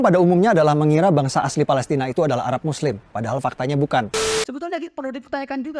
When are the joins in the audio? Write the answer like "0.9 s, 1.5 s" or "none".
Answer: 4.2 s